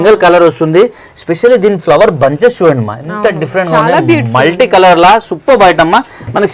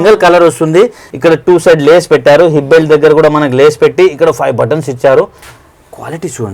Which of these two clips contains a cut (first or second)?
second